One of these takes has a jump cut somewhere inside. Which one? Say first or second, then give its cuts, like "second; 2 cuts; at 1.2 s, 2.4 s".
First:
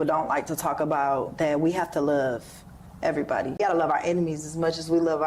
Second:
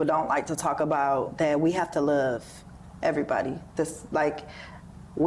first; 1 cut; at 3.6 s